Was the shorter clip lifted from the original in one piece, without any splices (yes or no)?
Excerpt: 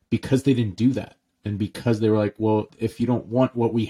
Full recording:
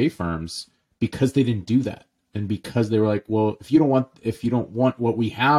no